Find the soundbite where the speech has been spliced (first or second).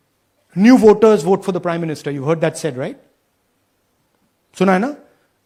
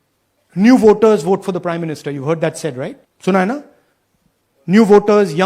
second